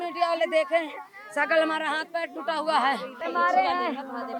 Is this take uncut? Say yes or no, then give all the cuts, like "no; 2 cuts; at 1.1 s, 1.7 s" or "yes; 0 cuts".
no; 1 cut; at 3.3 s